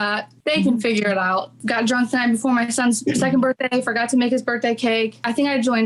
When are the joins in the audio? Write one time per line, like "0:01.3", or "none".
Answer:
0:01.6